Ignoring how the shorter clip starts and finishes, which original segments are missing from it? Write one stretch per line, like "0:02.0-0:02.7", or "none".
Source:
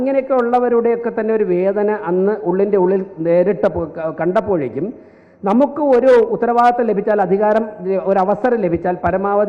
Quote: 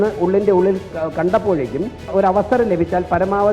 0:03.1-0:03.9
0:05.1-0:08.0